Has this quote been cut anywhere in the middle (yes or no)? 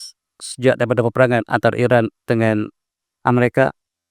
no